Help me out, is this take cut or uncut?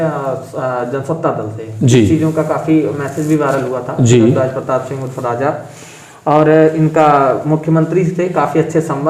uncut